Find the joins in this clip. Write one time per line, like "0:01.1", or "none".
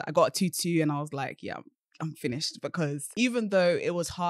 0:03.1